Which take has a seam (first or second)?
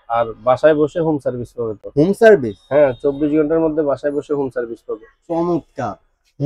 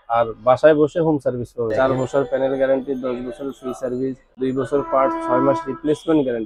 second